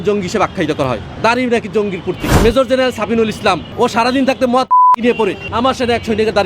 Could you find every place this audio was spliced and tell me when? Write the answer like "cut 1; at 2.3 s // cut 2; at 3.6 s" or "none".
cut 1; at 1.1 s // cut 2; at 2.3 s // cut 3; at 3.7 s // cut 4; at 5.4 s